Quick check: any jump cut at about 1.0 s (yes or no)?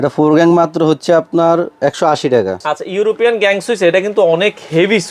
no